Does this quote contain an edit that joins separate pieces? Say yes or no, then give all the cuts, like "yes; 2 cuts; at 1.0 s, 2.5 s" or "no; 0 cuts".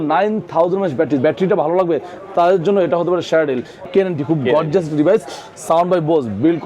yes; 2 cuts; at 1.2 s, 3.9 s